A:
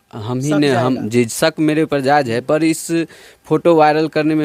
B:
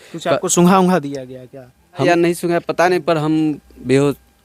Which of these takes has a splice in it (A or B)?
B